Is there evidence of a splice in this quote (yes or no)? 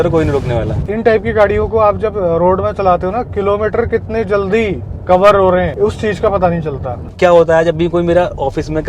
yes